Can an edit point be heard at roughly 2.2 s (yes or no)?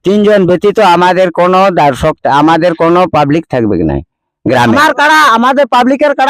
no